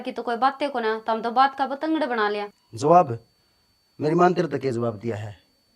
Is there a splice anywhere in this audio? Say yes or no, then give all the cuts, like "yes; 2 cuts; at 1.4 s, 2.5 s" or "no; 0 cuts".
yes; 1 cut; at 2.5 s